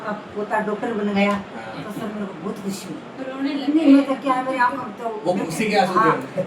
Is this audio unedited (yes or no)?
yes